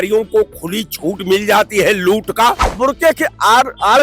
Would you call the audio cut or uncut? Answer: cut